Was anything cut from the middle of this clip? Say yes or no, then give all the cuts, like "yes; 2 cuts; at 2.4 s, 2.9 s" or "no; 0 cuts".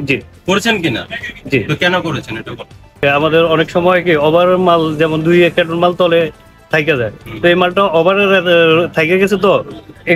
yes; 1 cut; at 3.0 s